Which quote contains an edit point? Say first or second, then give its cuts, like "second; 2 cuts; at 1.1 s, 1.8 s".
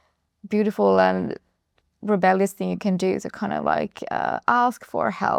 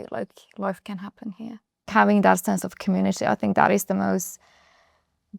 second; 1 cut; at 1.9 s